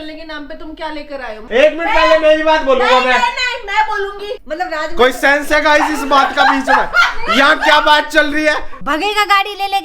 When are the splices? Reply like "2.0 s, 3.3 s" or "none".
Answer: 1.4 s, 4.4 s, 8.8 s